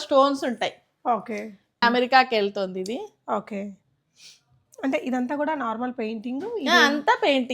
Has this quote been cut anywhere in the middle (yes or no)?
yes